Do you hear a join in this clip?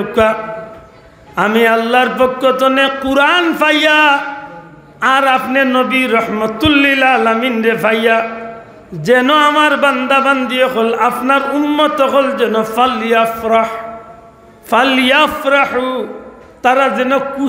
no; 0 cuts

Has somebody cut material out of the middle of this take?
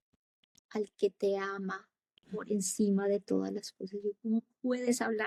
no; 0 cuts

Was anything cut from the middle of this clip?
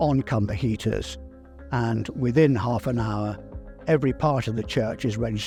no; 0 cuts

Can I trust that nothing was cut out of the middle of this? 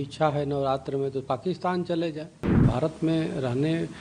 no; 1 cut; at 2.7 s

